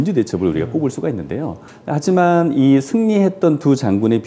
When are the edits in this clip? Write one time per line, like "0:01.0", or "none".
0:01.7